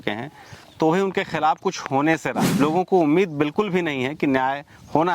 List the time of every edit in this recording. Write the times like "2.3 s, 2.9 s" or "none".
2.4 s